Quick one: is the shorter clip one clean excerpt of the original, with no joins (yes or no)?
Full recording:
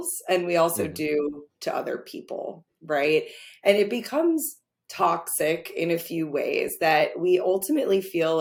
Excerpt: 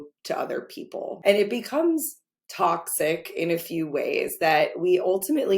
no